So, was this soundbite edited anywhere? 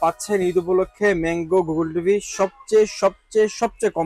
no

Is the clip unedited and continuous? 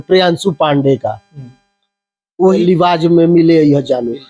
no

